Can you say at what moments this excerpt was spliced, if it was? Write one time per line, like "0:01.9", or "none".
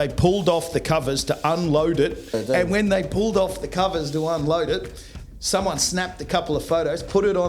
0:02.4